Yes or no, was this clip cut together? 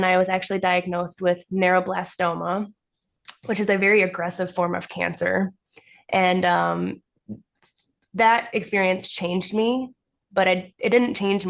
no